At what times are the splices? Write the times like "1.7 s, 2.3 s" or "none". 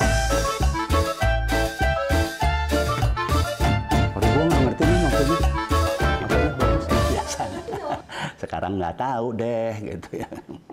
none